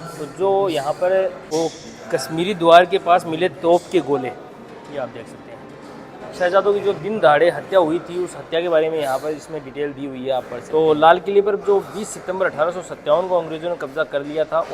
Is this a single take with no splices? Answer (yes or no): no